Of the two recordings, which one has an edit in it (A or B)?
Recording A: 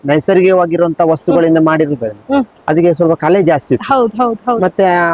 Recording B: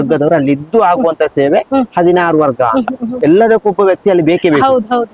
B